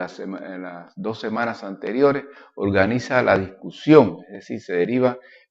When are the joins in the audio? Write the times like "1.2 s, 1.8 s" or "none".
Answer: 3.2 s